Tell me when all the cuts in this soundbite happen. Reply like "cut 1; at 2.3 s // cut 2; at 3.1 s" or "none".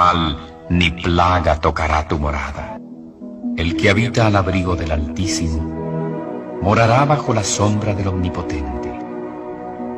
cut 1; at 2.7 s